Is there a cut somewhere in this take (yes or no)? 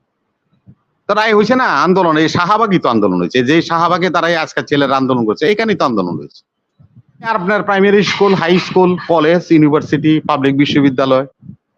yes